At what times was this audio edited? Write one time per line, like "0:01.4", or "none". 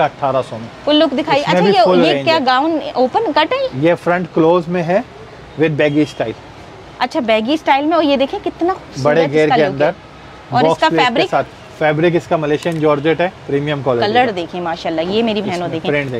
none